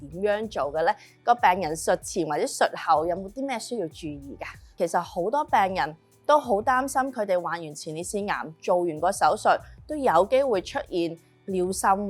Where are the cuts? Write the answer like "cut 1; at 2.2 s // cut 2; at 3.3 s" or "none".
cut 1; at 4.8 s